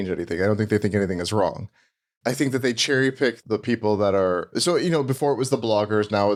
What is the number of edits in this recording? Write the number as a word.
zero